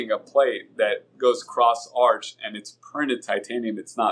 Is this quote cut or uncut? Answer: uncut